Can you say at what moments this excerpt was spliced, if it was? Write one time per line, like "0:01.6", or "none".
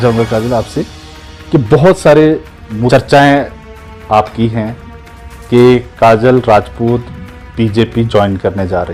0:02.9